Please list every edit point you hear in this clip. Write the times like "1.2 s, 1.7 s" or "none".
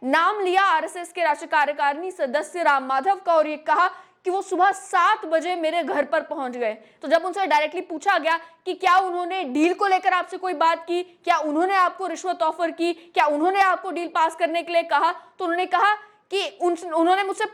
6.9 s